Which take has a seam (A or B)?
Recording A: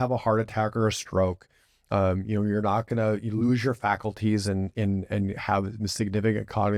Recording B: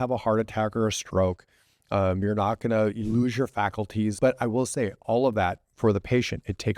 B